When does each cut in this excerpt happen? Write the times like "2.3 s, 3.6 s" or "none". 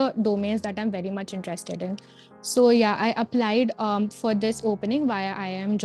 none